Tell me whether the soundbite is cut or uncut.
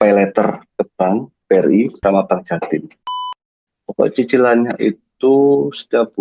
cut